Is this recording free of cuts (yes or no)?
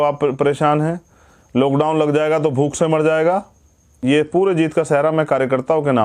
no